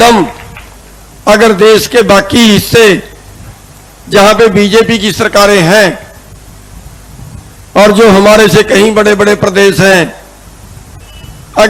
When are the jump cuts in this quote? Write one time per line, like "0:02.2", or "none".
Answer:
none